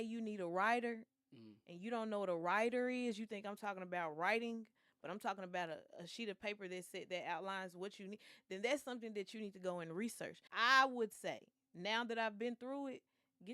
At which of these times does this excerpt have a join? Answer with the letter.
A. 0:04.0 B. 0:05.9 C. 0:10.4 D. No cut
C